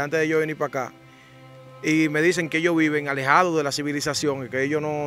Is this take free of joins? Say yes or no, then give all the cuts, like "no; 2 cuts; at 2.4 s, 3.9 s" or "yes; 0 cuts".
yes; 0 cuts